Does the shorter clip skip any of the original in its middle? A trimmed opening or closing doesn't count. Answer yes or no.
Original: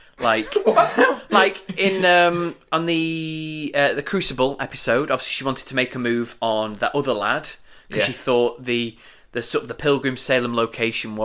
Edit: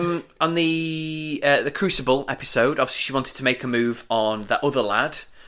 no